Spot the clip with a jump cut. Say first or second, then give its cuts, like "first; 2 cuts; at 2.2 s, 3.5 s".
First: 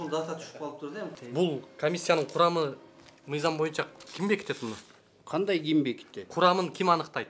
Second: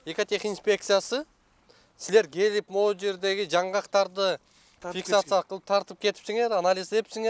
first; 1 cut; at 1.2 s